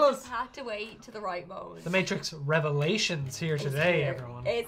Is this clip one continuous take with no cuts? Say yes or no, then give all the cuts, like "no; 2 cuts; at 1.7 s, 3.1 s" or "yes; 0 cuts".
no; 1 cut; at 1.7 s